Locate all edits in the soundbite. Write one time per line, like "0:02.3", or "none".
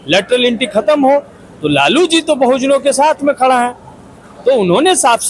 none